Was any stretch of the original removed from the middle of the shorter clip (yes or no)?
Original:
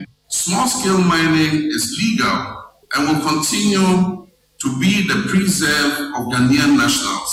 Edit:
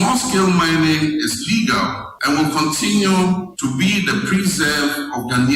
yes